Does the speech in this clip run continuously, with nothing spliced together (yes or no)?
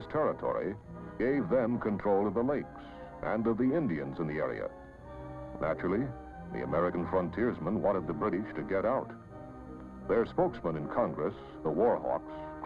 no